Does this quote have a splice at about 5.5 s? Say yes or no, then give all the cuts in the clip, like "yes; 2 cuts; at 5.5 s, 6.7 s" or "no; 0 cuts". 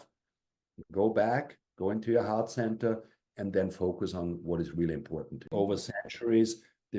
yes; 1 cut; at 5.5 s